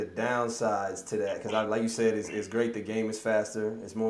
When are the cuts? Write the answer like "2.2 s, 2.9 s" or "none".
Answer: none